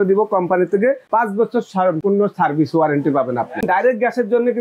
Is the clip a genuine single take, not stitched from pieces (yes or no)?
no